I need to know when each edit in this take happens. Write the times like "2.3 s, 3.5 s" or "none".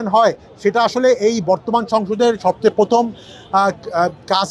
none